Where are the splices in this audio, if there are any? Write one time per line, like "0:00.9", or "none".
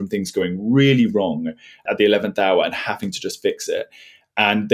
0:01.8